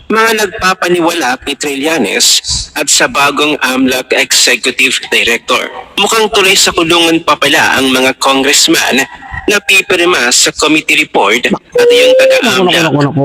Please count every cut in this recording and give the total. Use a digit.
0